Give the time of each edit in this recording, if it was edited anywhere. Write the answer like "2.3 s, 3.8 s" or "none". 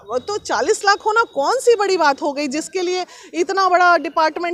none

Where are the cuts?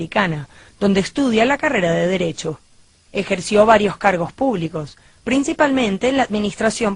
4.9 s

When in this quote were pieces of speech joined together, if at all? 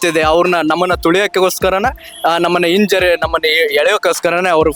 none

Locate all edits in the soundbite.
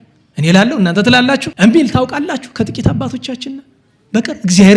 1.5 s

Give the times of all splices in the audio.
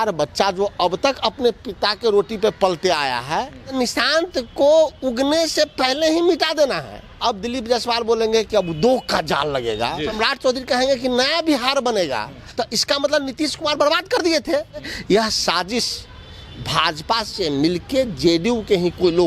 3.7 s, 7.0 s, 10.2 s, 12.4 s, 14.9 s

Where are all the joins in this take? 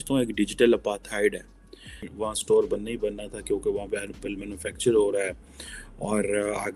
2.1 s

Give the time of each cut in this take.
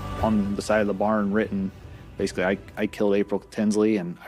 none

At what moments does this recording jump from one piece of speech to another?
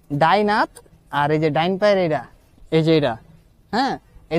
none

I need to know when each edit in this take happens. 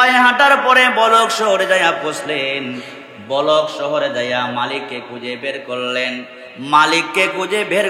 none

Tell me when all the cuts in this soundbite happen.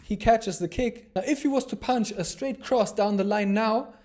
1.0 s

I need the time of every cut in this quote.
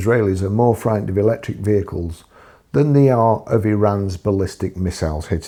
none

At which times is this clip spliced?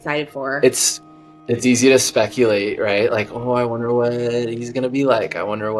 none

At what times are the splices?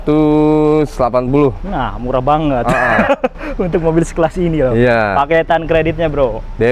none

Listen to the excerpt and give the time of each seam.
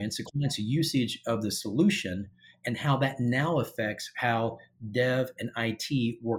none

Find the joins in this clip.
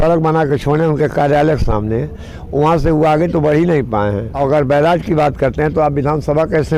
4.3 s

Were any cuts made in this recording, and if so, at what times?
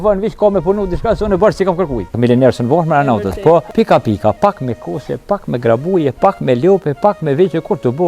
2.2 s, 3.7 s

